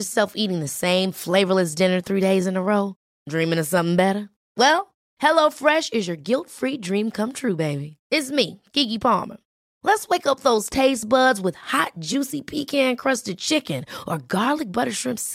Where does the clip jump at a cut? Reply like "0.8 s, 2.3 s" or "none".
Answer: none